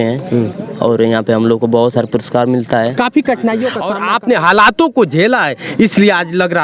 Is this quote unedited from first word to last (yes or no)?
no